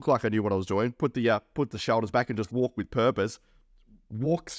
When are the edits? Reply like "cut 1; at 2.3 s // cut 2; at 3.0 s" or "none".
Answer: none